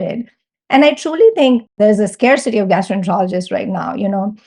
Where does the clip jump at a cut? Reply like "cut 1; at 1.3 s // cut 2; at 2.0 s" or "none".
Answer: cut 1; at 1.7 s